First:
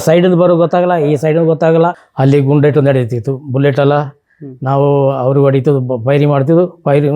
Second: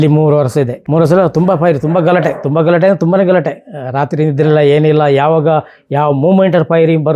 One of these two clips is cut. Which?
first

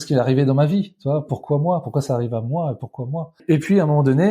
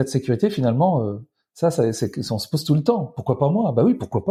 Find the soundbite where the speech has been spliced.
first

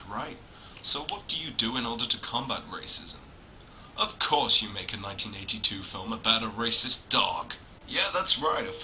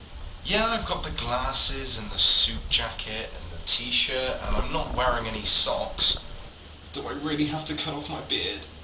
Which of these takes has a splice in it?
second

